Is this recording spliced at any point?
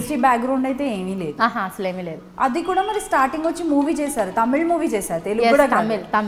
no; 0 cuts

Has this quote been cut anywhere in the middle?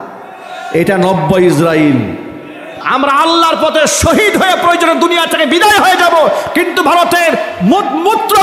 yes; 1 cut; at 2.8 s

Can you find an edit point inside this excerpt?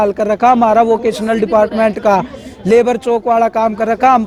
no; 0 cuts

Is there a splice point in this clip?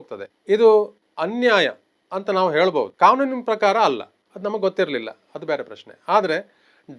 yes; 2 cuts; at 2.9 s, 4.2 s

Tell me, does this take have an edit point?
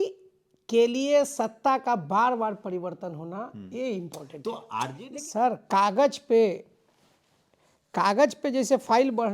yes; 1 cut; at 4.9 s

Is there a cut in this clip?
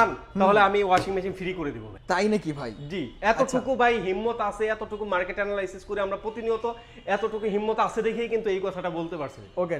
no; 0 cuts

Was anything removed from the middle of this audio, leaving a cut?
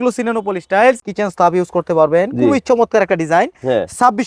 yes; 1 cut; at 1.1 s

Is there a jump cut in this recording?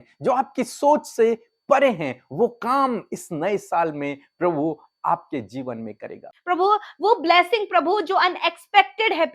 yes; 1 cut; at 6.3 s

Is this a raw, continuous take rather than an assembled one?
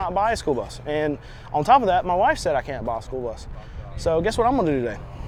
yes; 0 cuts

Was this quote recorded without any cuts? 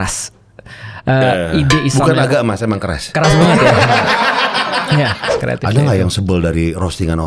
no; 1 cut; at 5.3 s

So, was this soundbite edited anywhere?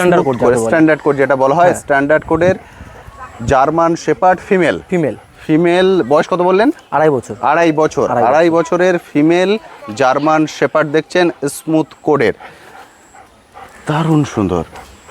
no; 0 cuts

